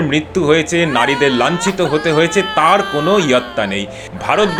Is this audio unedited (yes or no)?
yes